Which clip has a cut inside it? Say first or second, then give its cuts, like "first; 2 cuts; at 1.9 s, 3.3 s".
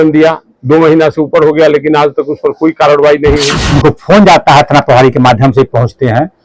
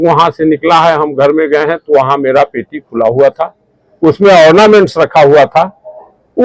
first; 1 cut; at 3.6 s